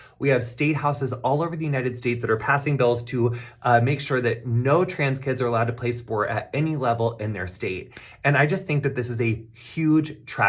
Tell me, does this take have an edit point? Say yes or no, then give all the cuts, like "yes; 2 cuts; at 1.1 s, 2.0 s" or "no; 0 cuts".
yes; 1 cut; at 6.4 s